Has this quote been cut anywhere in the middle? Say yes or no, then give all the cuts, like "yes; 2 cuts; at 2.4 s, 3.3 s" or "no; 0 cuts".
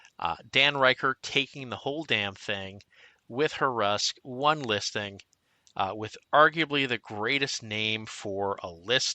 no; 0 cuts